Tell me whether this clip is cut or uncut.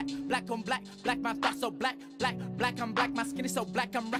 uncut